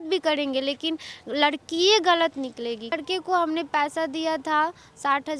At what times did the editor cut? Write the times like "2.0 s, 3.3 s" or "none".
3.0 s